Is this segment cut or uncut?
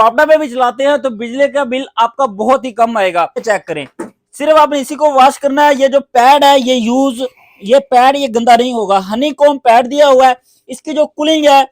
cut